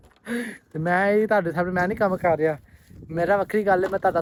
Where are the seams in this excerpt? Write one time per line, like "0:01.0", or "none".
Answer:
none